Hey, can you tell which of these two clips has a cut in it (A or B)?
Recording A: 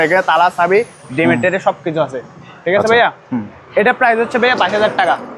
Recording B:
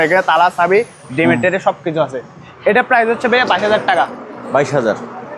B